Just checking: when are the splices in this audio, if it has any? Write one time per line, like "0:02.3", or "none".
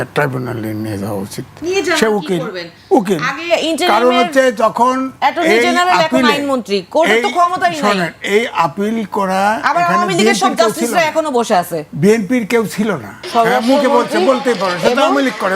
0:13.2